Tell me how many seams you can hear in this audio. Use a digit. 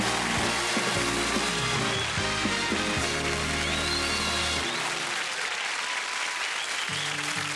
1